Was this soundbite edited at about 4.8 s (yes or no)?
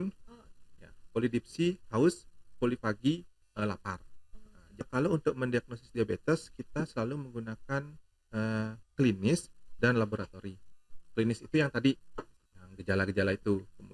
yes